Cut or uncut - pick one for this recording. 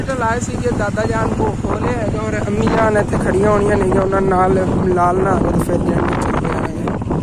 uncut